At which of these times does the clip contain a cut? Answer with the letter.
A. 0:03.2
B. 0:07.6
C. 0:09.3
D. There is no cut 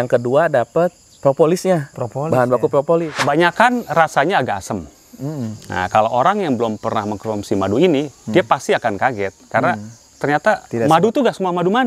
A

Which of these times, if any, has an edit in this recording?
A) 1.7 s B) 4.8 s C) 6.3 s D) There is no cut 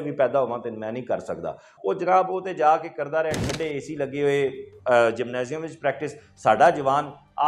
A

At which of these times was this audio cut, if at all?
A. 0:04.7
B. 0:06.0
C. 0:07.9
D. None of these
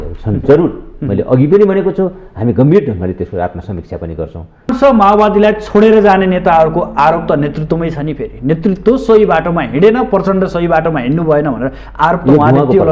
A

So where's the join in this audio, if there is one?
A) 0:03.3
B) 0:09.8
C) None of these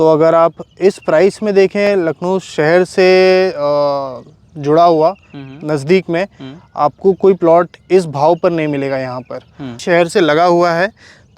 B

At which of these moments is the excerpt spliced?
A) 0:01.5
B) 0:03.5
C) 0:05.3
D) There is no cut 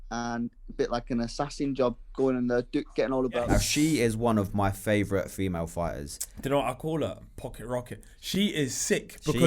B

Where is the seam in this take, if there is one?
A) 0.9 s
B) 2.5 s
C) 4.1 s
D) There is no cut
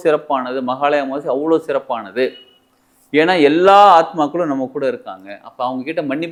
D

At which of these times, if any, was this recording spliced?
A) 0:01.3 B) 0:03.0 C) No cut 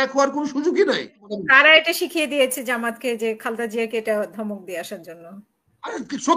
A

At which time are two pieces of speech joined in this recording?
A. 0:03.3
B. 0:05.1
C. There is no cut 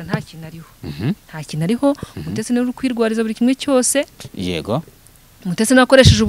C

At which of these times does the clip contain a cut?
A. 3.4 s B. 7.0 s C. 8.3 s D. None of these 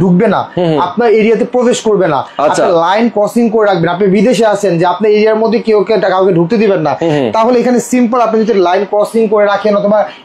D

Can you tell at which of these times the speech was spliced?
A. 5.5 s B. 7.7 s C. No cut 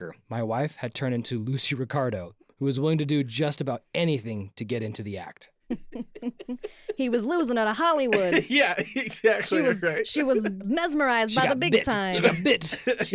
C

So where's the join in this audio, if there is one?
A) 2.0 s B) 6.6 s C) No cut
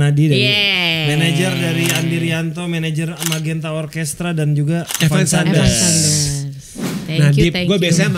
C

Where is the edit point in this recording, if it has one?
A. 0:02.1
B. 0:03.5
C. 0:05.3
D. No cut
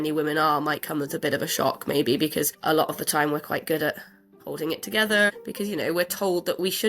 C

